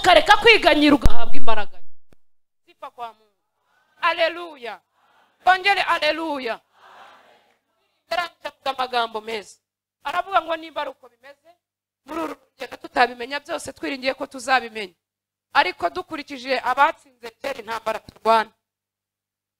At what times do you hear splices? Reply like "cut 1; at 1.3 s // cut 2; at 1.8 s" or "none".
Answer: none